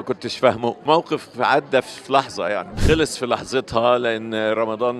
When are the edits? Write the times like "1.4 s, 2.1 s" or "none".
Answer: 0.8 s, 2.8 s